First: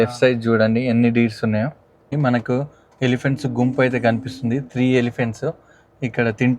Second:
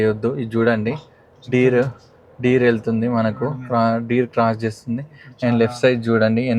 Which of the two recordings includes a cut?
first; 1 cut; at 1.9 s

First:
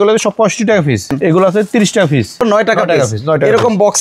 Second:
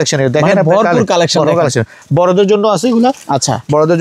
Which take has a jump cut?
first; 2 cuts; at 1.1 s, 2.6 s

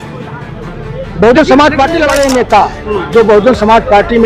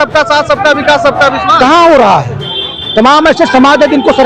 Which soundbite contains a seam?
first; 1 cut; at 2.1 s

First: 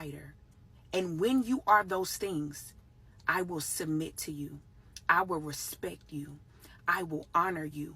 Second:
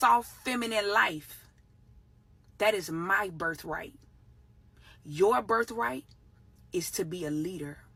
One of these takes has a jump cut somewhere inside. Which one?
first; 1 cut; at 6.9 s

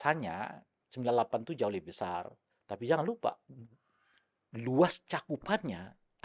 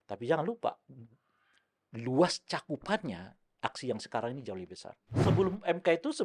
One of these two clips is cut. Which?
second; 1 cut; at 5.1 s

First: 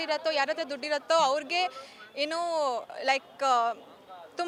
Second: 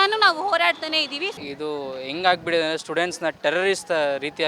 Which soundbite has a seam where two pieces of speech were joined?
second; 1 cut; at 1.3 s

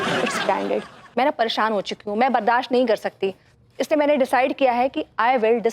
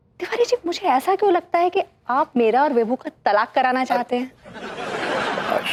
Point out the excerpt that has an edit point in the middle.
first; 1 cut; at 1.0 s

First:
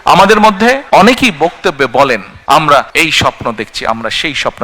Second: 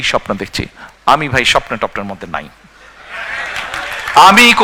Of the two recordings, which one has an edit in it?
first; 3 cuts; at 0.8 s, 2.3 s, 2.9 s

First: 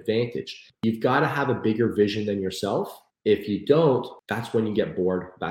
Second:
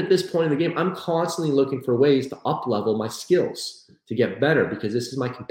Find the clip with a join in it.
first; 3 cuts; at 0.8 s, 3.0 s, 4.1 s

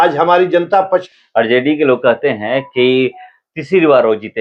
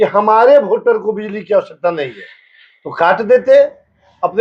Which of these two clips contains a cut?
first; 1 cut; at 1.1 s

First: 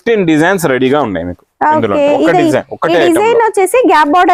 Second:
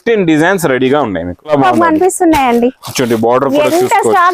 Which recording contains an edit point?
second; 1 cut; at 1.5 s

